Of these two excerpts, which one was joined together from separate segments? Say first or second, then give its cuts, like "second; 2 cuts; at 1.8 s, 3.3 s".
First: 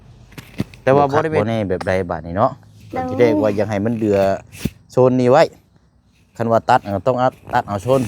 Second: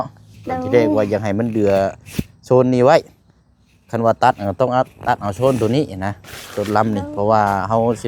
first; 1 cut; at 1.4 s